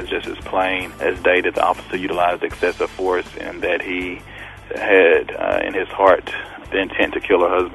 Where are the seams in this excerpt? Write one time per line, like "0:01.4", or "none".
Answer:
0:00.9
0:04.6
0:06.5